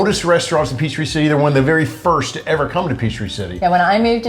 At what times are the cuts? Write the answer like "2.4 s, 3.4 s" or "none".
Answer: none